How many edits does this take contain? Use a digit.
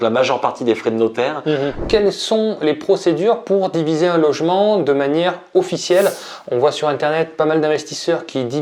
1